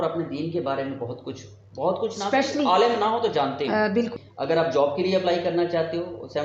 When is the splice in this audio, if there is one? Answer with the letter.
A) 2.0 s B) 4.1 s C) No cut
B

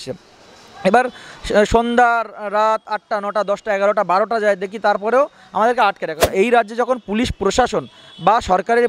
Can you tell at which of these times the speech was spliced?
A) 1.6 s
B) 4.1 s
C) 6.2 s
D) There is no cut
C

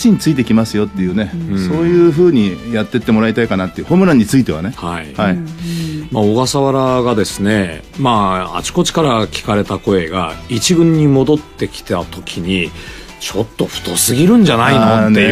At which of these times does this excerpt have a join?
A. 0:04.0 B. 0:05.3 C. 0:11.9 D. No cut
A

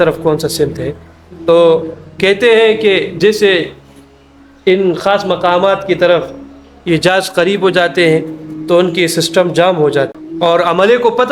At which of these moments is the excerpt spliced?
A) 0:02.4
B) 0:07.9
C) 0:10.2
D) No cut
C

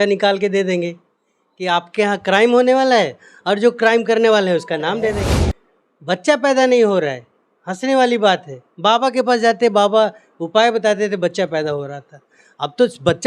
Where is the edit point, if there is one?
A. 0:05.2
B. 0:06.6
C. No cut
A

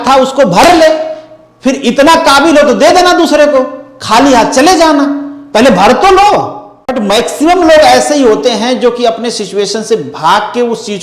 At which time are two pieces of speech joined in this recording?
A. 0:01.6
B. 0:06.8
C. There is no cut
B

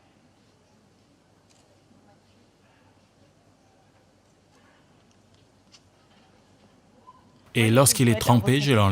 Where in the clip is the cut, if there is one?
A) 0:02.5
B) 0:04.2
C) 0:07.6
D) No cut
C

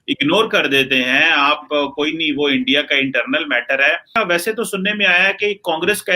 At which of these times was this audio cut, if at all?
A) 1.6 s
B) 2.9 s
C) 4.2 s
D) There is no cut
C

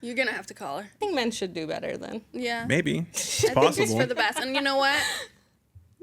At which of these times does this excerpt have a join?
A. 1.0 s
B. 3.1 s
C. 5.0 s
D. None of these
A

